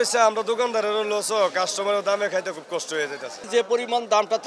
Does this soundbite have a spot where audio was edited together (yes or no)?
yes